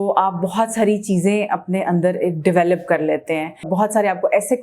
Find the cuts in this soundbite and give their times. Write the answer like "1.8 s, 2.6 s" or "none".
3.7 s